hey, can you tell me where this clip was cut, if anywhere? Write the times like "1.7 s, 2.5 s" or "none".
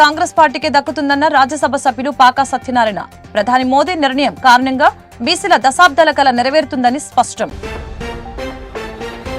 none